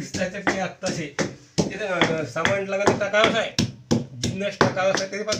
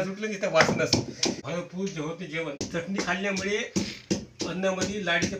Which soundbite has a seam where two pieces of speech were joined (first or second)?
second